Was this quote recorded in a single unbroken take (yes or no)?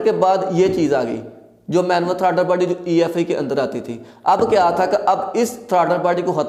yes